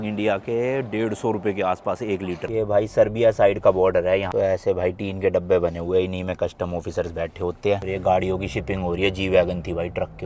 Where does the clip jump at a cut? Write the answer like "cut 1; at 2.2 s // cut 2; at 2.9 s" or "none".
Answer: cut 1; at 2.4 s // cut 2; at 4.3 s // cut 3; at 7.8 s